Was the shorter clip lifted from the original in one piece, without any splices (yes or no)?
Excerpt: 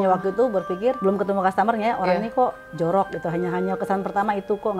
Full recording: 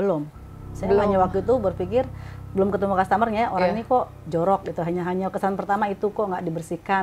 no